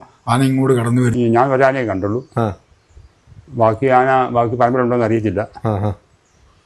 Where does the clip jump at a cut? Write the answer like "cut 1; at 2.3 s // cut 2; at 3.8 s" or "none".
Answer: cut 1; at 1.1 s